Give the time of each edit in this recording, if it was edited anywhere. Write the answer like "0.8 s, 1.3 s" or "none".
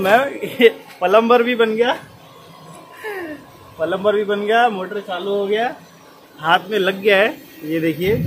none